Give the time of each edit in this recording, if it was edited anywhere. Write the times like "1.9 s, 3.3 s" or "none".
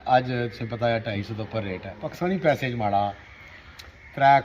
2.1 s